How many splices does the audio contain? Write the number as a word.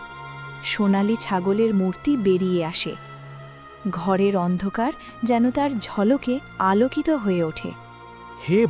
zero